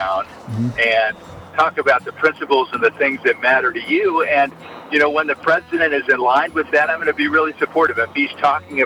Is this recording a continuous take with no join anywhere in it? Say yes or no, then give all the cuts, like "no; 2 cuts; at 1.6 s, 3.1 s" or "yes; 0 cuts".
yes; 0 cuts